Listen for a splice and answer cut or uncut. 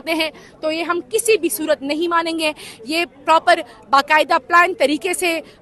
uncut